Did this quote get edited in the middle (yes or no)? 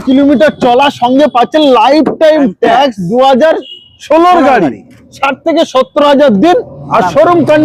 no